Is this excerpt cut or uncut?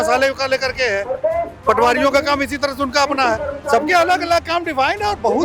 uncut